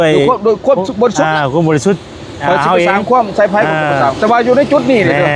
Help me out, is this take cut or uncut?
uncut